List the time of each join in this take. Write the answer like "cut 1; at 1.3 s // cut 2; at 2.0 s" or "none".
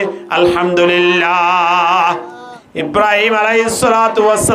cut 1; at 2.5 s